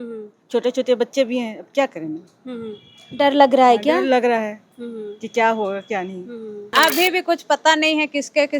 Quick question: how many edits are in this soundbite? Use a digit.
1